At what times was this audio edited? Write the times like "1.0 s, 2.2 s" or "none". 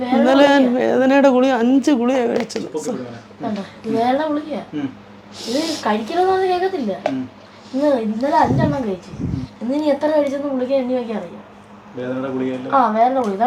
none